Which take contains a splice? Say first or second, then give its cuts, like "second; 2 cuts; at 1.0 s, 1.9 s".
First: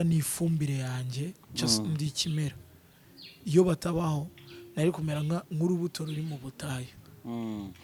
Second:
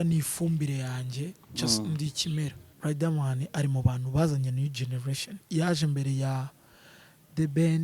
second; 1 cut; at 2.7 s